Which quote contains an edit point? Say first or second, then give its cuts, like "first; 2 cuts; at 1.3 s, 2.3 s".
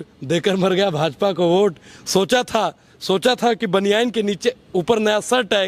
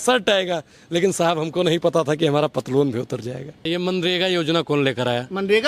second; 1 cut; at 3.7 s